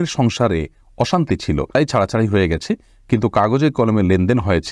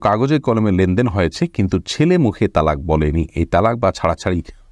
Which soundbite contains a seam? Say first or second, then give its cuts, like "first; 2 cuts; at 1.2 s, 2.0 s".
first; 1 cut; at 1.8 s